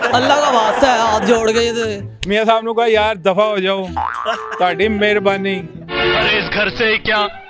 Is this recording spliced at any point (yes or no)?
yes